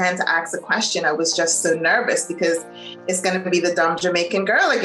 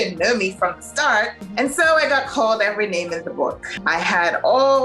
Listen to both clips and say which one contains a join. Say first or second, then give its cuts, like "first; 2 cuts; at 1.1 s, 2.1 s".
second; 2 cuts; at 1.4 s, 3.7 s